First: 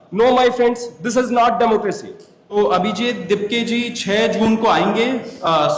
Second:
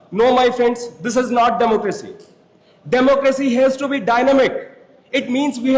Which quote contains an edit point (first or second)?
first